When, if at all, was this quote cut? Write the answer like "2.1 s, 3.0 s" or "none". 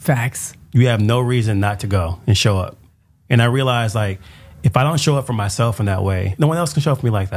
6.3 s